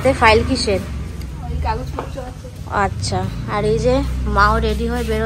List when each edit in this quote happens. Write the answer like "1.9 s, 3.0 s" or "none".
none